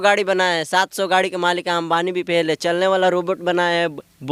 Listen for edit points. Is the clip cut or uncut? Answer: uncut